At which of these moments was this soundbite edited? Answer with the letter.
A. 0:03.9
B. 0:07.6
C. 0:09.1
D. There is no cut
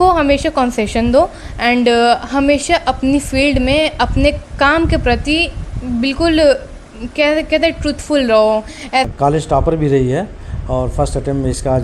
C